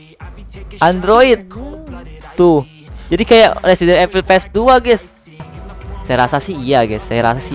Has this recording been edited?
yes; 1 cut; at 5.5 s

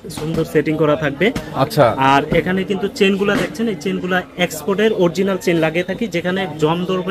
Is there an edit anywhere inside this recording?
no; 0 cuts

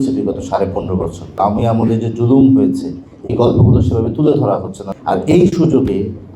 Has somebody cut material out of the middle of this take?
yes; 2 cuts; at 1.4 s, 4.8 s

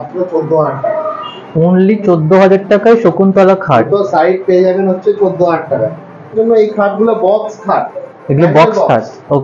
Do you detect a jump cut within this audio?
yes; 1 cut; at 6.3 s

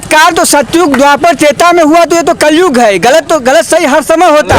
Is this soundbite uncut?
yes; 0 cuts

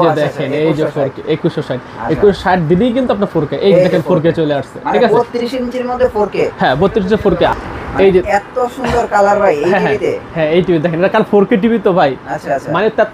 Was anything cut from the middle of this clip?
no; 0 cuts

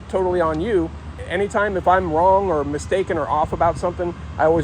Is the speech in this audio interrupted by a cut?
yes; 1 cut; at 1.2 s

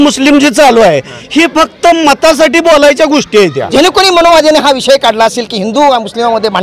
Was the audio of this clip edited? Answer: yes; 1 cut; at 3.6 s

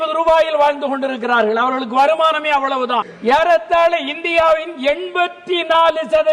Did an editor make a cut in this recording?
yes; 1 cut; at 3.1 s

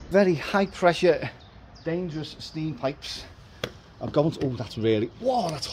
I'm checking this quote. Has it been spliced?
no; 0 cuts

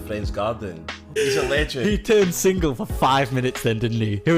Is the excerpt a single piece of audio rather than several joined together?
no; 1 cut; at 1.1 s

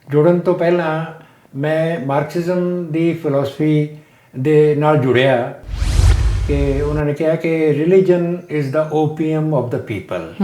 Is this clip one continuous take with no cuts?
no; 1 cut; at 6.0 s

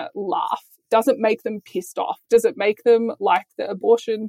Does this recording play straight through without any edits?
yes; 0 cuts

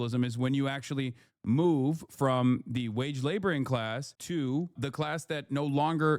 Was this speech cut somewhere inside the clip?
yes; 1 cut; at 4.7 s

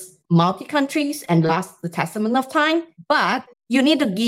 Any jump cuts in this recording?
yes; 1 cut; at 3.3 s

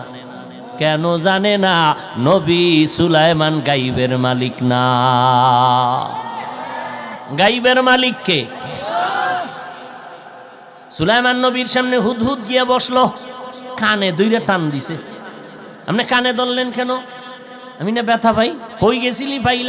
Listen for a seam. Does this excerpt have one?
yes; 1 cut; at 18.7 s

